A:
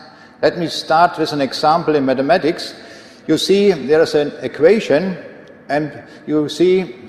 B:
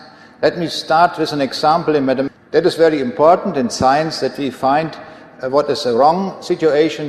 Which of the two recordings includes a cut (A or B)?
A